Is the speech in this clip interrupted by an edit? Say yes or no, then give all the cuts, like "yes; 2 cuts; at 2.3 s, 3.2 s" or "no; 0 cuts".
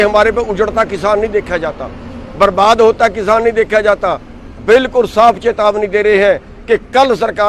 no; 0 cuts